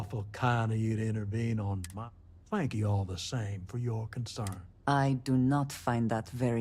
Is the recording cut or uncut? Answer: cut